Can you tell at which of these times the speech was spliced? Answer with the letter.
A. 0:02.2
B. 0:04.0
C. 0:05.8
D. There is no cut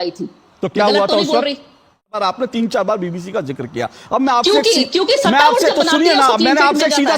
A